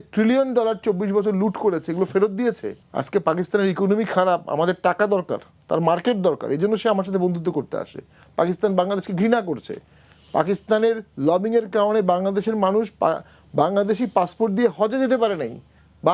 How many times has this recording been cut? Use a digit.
0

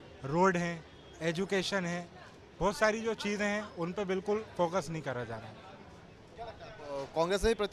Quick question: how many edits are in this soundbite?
0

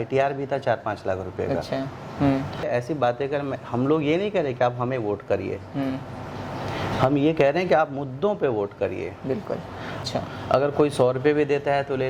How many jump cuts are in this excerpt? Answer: 2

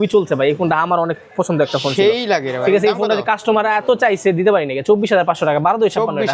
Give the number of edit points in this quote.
0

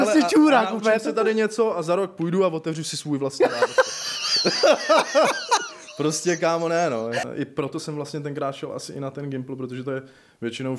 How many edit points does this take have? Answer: 1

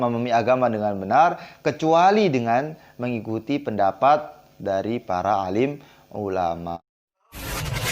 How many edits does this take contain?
1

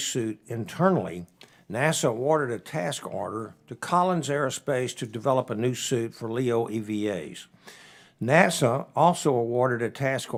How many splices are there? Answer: 0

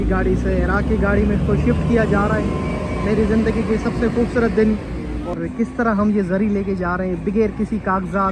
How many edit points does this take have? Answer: 1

